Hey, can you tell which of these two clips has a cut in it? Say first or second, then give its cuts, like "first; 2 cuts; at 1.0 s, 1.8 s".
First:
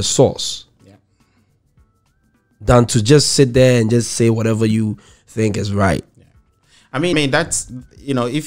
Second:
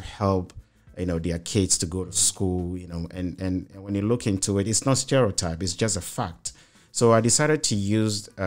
first; 1 cut; at 7.1 s